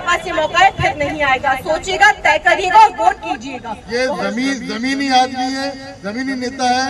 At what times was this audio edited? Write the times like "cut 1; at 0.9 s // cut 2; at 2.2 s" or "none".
cut 1; at 3.7 s